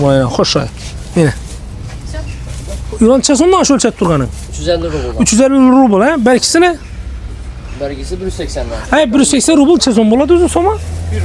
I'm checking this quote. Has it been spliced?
no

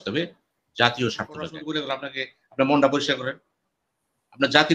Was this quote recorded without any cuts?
no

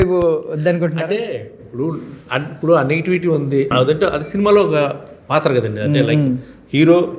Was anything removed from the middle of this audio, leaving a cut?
no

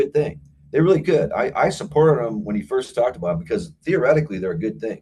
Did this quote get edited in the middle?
no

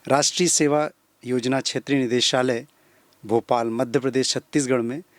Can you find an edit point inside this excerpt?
no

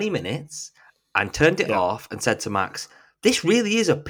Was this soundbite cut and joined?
no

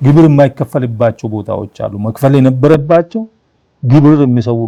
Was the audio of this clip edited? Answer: no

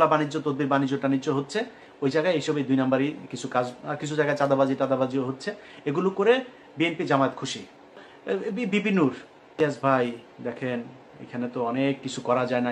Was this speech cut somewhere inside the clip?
yes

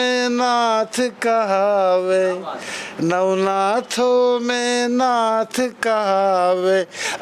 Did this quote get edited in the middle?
no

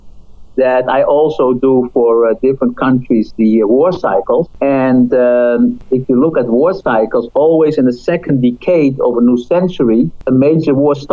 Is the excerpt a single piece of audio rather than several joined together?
no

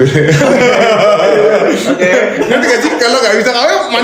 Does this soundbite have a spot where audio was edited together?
no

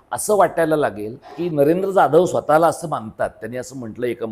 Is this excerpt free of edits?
no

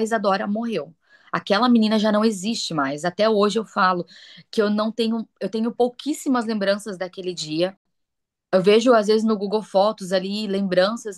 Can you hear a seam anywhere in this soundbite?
no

